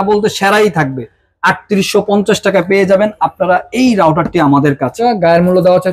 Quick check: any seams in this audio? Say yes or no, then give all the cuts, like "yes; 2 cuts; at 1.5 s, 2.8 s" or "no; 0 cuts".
yes; 1 cut; at 5.0 s